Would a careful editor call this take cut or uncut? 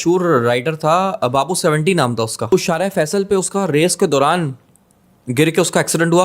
cut